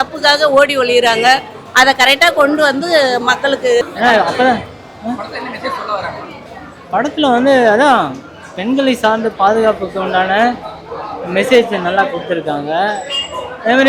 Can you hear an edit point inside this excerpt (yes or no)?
yes